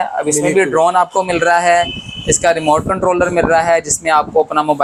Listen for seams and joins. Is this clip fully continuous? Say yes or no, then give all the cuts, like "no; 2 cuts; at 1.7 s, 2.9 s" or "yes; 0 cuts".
yes; 0 cuts